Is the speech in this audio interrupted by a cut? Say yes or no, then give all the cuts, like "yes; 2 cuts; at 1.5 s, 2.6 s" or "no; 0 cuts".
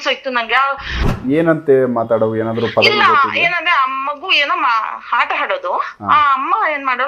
yes; 1 cut; at 1.0 s